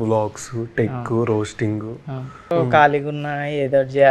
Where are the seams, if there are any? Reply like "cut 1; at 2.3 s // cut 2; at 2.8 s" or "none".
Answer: cut 1; at 2.5 s